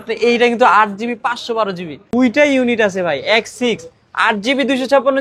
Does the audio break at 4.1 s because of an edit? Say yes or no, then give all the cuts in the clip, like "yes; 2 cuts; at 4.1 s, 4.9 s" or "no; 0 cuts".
no; 1 cut; at 2.0 s